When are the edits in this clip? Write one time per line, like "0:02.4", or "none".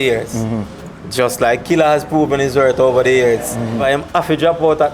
0:03.8